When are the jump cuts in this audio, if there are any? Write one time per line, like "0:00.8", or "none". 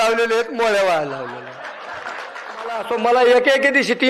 0:02.9